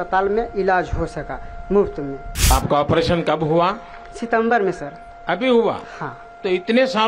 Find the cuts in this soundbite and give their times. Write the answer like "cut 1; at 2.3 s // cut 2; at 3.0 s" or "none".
cut 1; at 2.5 s